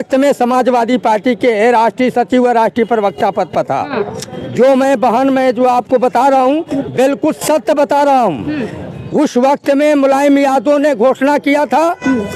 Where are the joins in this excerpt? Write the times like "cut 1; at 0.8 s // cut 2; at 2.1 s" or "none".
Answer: none